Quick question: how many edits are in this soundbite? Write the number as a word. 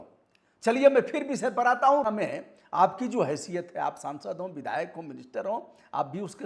one